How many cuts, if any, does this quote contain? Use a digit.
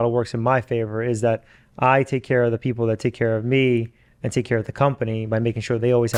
0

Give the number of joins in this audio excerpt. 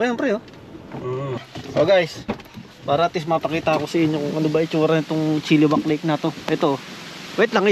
1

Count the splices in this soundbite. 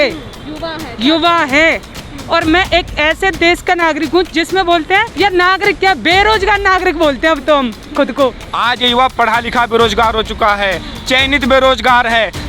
2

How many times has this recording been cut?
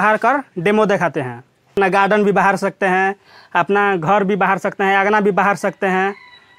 1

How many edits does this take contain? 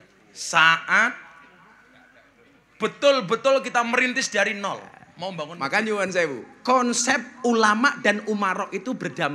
1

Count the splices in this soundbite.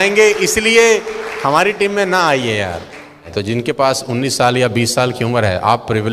1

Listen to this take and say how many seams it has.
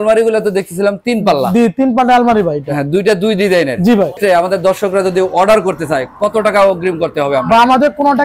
1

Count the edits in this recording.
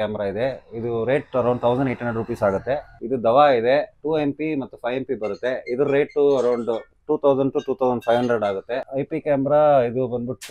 2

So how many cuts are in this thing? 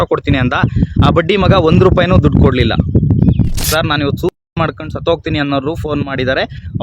1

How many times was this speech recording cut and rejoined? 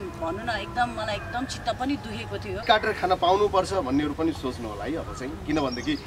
1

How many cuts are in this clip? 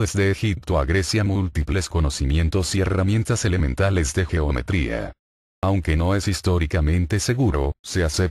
1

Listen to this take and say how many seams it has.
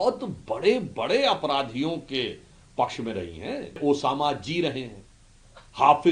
1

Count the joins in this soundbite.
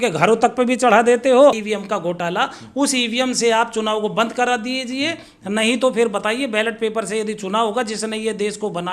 1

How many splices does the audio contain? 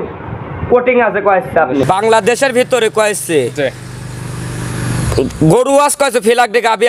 1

